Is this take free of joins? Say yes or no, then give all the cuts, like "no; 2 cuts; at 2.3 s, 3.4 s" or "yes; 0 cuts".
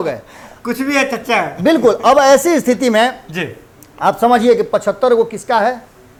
yes; 0 cuts